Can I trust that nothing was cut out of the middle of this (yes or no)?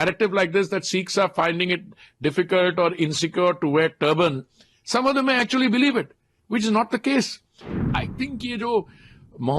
no